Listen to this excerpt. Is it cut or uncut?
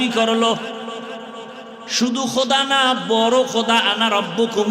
uncut